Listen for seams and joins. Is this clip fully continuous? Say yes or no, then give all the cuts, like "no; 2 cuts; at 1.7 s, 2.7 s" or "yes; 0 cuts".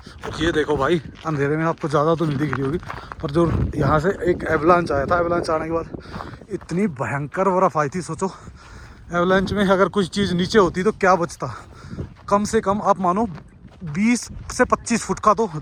yes; 0 cuts